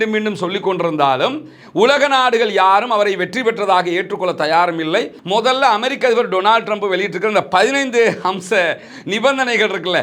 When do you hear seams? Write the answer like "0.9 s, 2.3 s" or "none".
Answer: 5.2 s

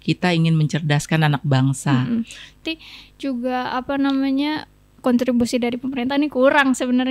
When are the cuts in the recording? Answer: 2.6 s

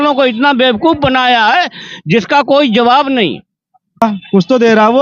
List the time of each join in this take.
4.0 s

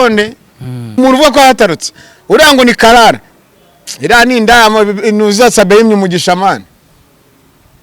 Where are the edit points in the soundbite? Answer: 1.0 s

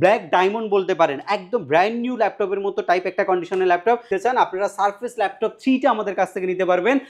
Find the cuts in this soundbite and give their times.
4.1 s

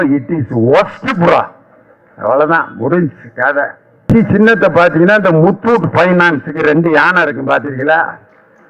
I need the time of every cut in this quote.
4.0 s

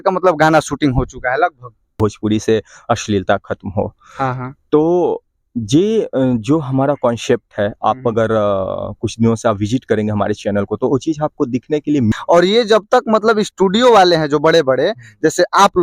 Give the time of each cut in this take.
1.9 s, 12.1 s

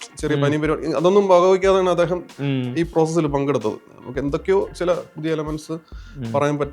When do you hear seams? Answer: 3.9 s

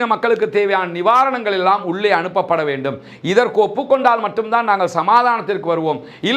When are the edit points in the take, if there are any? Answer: none

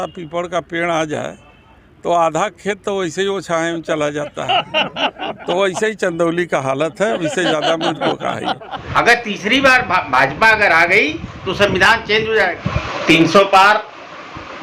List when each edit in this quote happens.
8.7 s, 12.6 s

